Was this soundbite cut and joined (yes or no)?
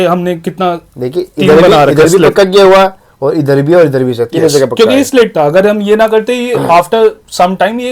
no